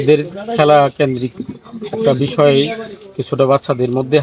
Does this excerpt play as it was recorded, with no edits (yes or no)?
yes